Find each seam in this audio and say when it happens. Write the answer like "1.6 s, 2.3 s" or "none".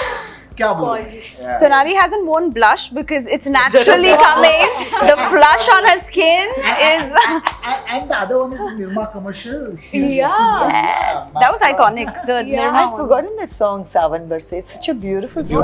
none